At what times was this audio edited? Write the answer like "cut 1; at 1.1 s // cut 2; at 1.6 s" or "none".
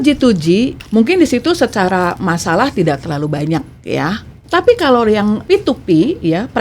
cut 1; at 4.3 s // cut 2; at 5.4 s